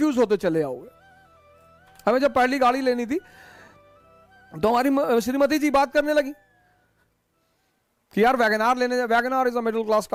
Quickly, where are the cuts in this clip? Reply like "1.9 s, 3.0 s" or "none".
none